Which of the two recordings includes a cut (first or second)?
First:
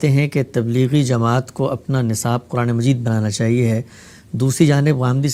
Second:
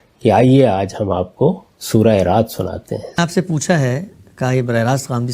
second